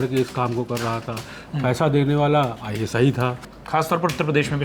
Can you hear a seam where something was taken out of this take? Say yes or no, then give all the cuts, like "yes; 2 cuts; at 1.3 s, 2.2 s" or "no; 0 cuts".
yes; 1 cut; at 3.5 s